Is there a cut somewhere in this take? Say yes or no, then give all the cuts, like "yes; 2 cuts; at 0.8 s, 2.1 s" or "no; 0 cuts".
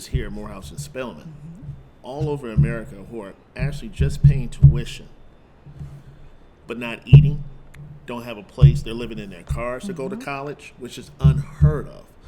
no; 0 cuts